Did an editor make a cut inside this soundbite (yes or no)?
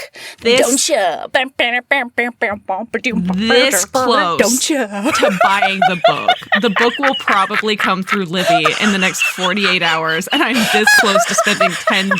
no